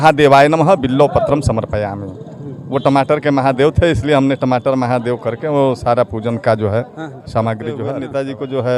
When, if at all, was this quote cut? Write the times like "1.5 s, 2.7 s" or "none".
7.9 s